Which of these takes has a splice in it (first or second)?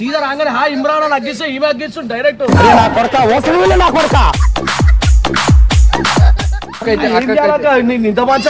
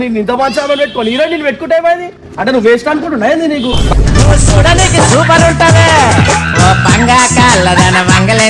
first